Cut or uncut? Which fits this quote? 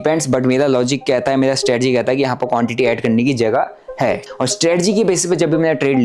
cut